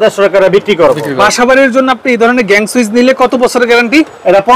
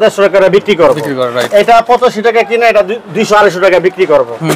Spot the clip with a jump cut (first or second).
first